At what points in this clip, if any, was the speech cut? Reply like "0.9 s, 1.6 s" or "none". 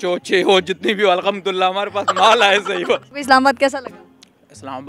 3.1 s